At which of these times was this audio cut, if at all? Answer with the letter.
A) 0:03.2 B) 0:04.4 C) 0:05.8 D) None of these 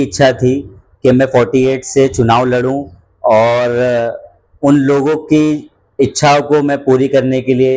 D